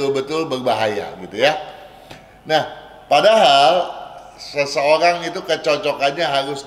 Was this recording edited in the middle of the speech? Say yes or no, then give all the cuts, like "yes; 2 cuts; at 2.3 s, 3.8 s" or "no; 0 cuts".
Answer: no; 0 cuts